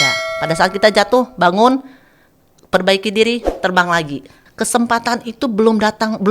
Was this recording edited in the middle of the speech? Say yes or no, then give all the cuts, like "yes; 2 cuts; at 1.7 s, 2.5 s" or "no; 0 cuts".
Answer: yes; 1 cut; at 4.4 s